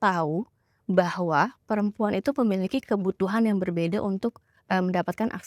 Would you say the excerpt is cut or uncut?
uncut